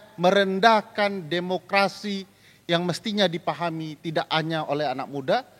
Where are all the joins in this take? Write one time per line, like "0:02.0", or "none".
none